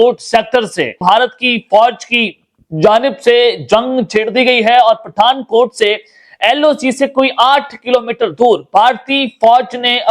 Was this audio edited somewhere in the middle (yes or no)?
yes